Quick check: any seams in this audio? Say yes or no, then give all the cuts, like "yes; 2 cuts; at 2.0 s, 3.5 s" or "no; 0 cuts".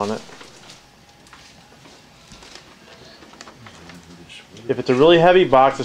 no; 0 cuts